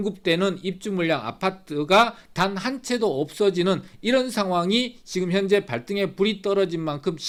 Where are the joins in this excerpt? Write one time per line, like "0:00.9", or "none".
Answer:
none